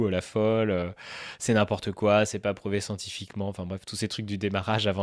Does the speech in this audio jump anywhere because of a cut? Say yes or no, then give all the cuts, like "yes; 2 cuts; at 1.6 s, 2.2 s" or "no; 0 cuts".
no; 0 cuts